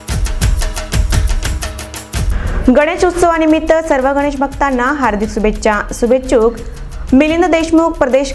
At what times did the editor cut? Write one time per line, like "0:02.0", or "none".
0:01.7